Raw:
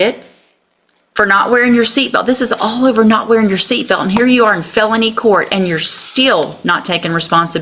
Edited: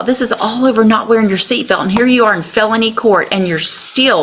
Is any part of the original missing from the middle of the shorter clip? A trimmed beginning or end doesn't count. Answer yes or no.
no